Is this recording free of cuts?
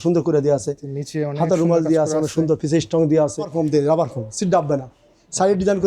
no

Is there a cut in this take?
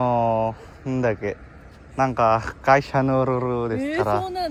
no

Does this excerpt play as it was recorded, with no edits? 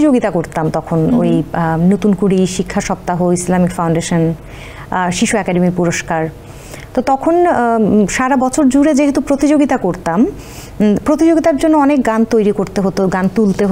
yes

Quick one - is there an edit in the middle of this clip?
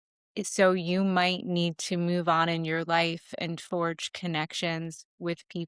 no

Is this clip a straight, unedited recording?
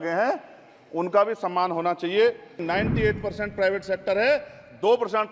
no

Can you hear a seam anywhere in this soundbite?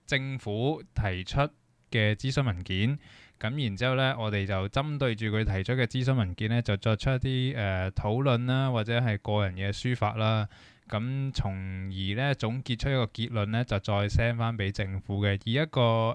no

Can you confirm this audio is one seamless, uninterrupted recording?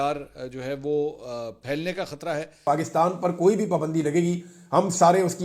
no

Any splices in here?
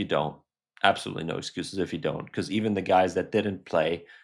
no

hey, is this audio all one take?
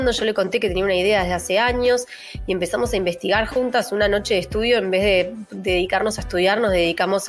yes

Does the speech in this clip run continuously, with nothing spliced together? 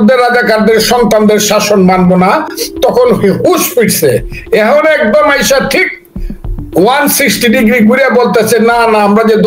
yes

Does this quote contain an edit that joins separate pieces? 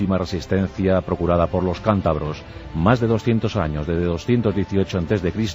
yes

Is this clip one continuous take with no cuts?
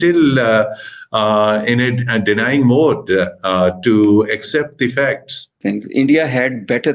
no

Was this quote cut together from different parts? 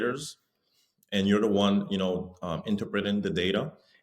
no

